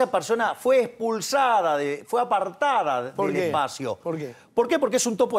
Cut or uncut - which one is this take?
uncut